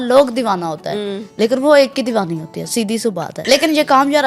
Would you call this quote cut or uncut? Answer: cut